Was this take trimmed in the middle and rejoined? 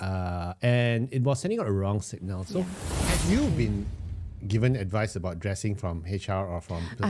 yes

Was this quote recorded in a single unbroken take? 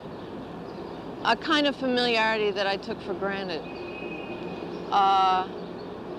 no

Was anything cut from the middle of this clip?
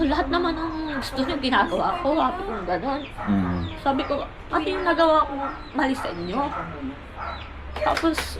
no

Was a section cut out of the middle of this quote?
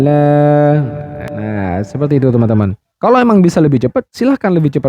yes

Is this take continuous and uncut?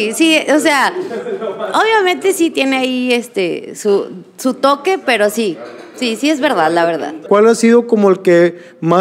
no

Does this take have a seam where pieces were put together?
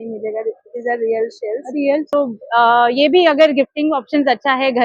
yes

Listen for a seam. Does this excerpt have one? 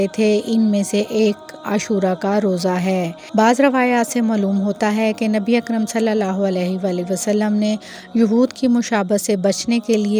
yes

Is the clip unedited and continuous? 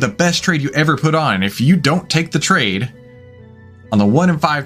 yes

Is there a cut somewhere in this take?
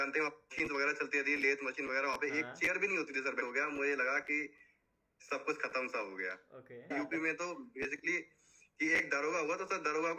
yes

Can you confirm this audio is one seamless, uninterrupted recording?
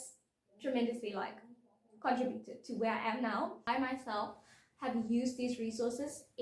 no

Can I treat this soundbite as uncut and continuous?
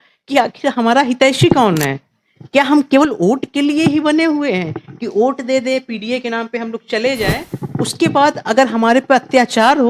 yes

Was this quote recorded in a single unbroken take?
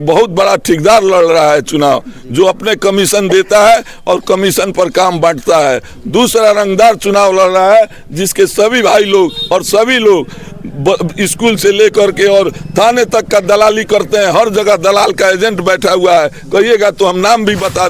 yes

